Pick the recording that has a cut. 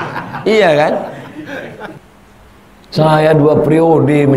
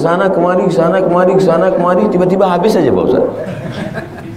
first; 1 cut; at 2.0 s

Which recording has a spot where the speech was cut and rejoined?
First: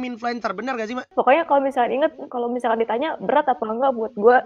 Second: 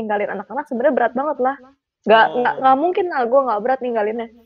first; 1 cut; at 1.1 s

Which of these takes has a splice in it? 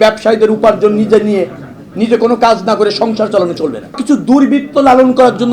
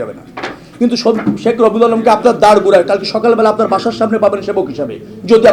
first; 1 cut; at 4.0 s

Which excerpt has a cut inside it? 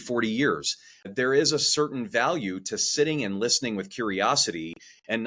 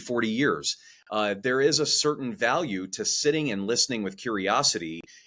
first; 1 cut; at 1.1 s

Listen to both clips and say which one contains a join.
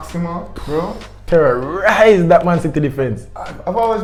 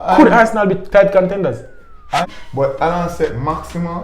second; 1 cut; at 2.3 s

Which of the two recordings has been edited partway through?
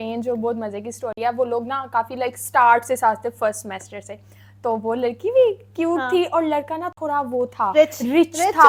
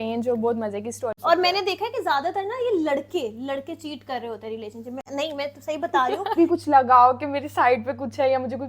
second; 2 cuts; at 1.1 s, 6.3 s

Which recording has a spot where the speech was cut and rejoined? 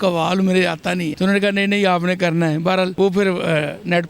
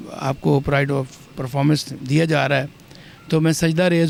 first; 2 cuts; at 1.1 s, 2.9 s

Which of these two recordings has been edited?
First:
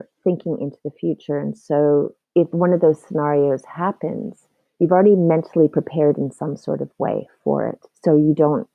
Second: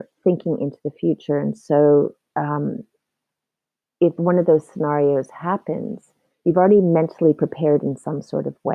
first; 1 cut; at 2.2 s

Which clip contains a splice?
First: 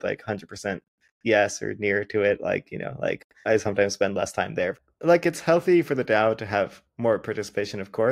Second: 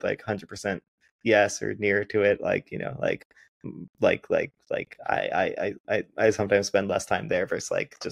first; 2 cuts; at 3.4 s, 4.8 s

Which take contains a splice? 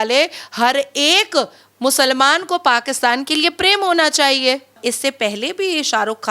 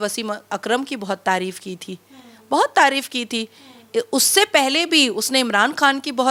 first; 1 cut; at 4.7 s

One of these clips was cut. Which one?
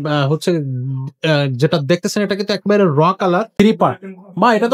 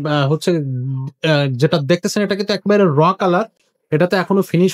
first; 1 cut; at 3.5 s

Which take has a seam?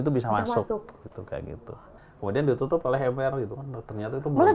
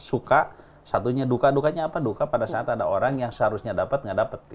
first; 1 cut; at 1.9 s

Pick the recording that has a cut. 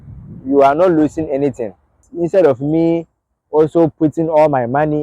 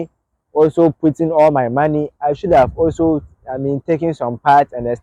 first; 1 cut; at 2.0 s

